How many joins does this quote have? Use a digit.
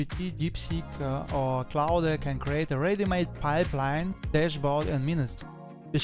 0